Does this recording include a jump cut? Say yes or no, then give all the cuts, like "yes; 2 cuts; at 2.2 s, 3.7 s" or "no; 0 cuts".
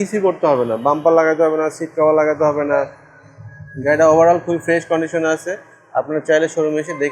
no; 0 cuts